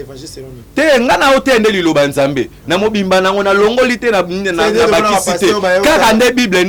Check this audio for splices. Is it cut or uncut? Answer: uncut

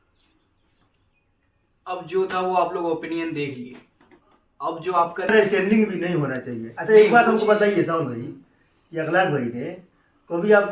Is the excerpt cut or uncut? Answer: cut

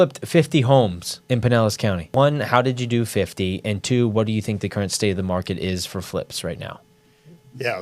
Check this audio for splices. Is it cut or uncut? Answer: cut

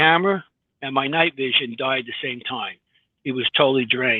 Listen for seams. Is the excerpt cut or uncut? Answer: uncut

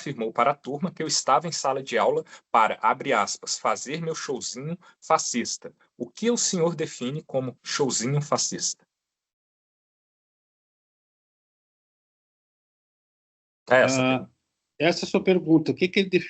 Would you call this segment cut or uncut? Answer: uncut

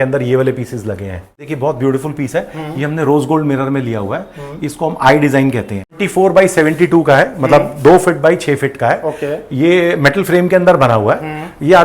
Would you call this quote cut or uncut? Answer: cut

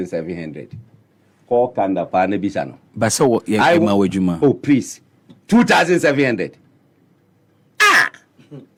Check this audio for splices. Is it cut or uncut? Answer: uncut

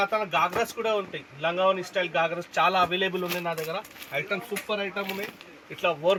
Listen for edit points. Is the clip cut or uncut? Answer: uncut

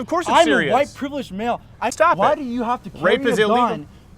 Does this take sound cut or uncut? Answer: cut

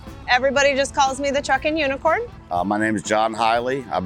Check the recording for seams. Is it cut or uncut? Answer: cut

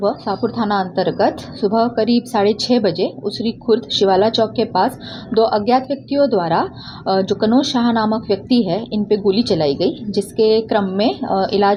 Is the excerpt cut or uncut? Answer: uncut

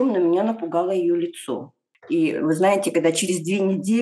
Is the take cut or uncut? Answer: cut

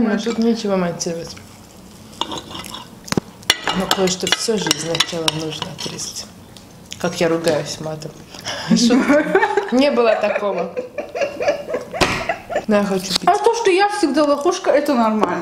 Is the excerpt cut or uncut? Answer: cut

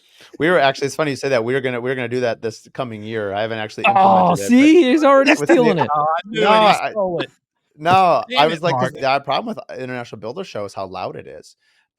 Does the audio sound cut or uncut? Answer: cut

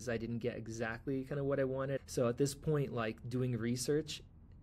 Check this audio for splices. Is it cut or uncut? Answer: cut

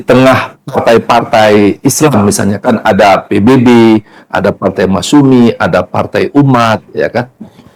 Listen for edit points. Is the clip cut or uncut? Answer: uncut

